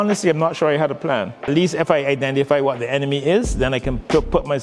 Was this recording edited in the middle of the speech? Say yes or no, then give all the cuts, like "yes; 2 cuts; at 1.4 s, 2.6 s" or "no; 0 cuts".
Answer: yes; 1 cut; at 1.5 s